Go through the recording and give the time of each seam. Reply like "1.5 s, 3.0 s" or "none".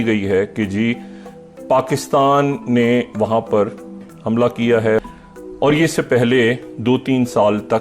4.1 s, 5.0 s

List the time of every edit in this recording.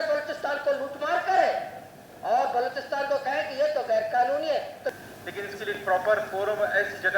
4.8 s

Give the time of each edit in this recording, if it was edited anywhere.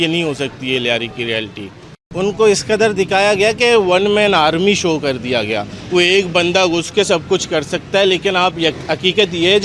2.1 s

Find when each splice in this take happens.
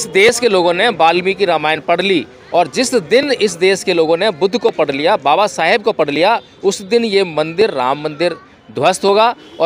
none

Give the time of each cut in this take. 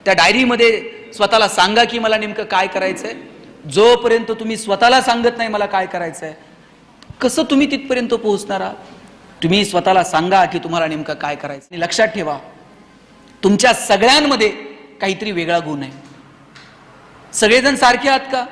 11.8 s

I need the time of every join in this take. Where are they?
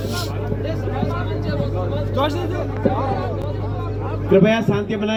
none

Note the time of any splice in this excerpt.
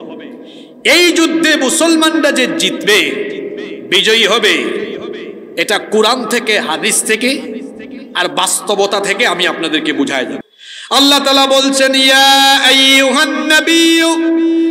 10.4 s

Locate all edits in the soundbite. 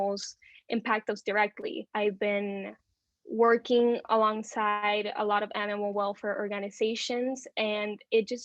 1.8 s

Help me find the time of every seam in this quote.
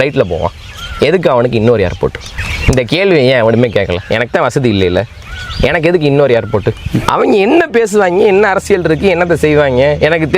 7.1 s

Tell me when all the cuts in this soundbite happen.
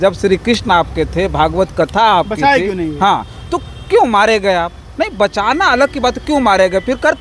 none

